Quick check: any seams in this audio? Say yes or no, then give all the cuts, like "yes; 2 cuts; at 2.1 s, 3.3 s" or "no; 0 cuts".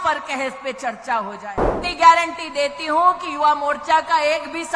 yes; 1 cut; at 1.8 s